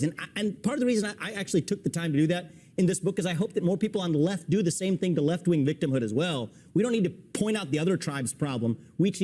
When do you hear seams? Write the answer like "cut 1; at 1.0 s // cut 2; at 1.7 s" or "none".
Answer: cut 1; at 6.5 s